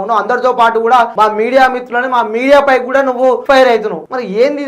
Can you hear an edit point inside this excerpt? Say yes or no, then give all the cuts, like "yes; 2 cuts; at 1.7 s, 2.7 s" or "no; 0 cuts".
yes; 2 cuts; at 1.1 s, 3.6 s